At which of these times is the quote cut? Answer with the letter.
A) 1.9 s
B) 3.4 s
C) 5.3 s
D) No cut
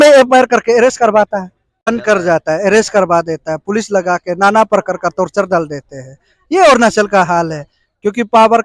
A